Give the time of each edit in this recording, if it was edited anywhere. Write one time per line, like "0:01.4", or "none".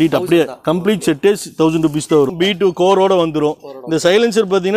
0:02.3

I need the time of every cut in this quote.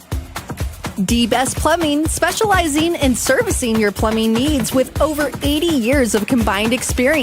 0:00.9

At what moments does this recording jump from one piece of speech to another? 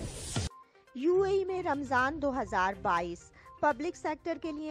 0:00.9

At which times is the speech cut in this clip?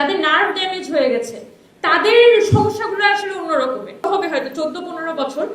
0:04.1

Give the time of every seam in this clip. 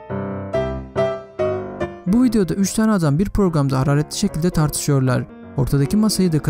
0:01.7

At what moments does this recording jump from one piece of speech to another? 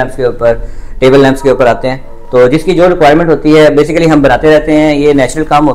none

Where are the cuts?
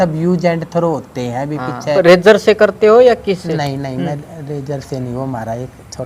0:01.9

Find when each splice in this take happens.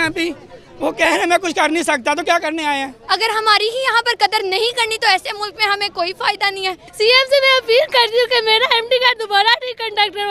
0:02.9
0:06.8

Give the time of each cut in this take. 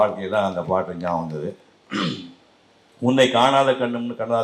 none

